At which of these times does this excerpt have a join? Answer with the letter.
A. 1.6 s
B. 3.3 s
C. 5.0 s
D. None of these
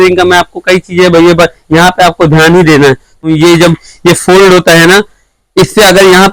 B